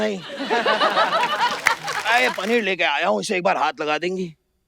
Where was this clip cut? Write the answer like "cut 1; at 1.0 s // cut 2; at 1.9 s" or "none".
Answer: cut 1; at 1.9 s